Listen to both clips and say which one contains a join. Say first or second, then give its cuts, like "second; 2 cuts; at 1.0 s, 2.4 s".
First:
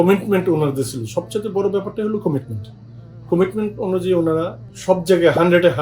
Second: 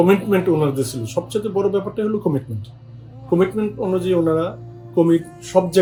first; 1 cut; at 4.7 s